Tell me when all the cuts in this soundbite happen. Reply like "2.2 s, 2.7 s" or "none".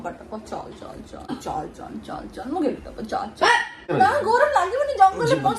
1.3 s, 3.8 s